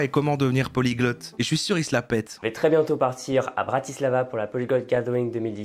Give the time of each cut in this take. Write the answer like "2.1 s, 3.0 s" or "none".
2.5 s